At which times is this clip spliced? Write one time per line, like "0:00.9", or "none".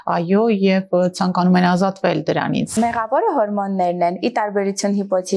0:02.7